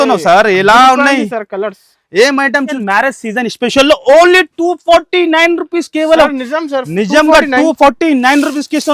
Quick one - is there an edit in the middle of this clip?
yes; 1 cut; at 2.8 s

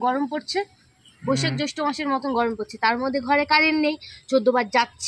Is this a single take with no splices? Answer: yes; 0 cuts

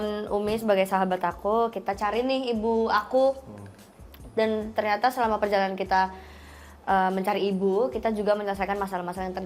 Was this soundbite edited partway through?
no; 0 cuts

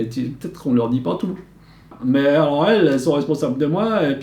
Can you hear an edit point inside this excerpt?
yes; 1 cut; at 1.9 s

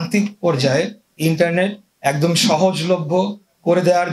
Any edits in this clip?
no; 0 cuts

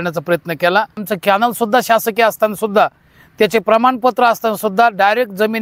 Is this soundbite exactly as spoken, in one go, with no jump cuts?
no; 1 cut; at 1.1 s

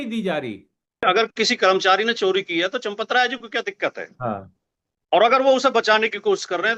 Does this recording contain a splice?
yes; 1 cut; at 1.1 s

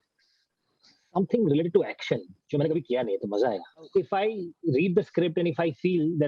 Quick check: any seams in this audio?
yes; 1 cut; at 3.8 s

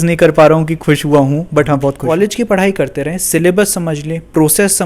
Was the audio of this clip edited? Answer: yes; 1 cut; at 2.0 s

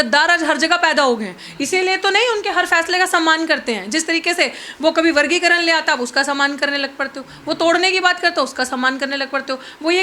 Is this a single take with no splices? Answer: yes; 0 cuts

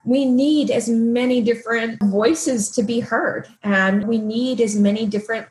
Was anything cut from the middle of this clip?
yes; 2 cuts; at 2.0 s, 4.0 s

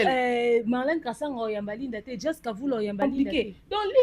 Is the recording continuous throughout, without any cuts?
no; 1 cut; at 3.0 s

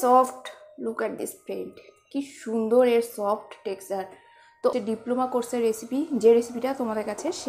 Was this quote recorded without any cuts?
no; 1 cut; at 4.8 s

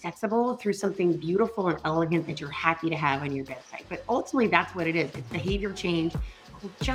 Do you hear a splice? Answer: no; 0 cuts

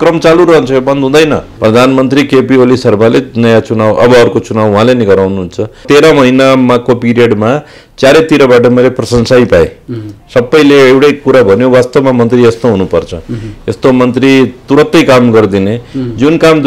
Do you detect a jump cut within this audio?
yes; 2 cuts; at 1.5 s, 5.8 s

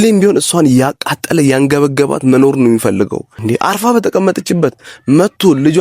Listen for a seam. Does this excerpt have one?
yes; 1 cut; at 3.3 s

